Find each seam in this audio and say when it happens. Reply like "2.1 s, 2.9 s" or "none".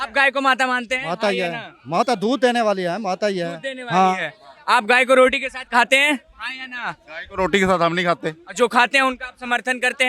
none